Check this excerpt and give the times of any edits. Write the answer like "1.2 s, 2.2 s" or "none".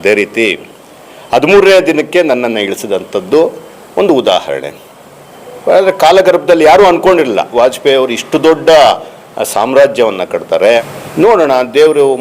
11.0 s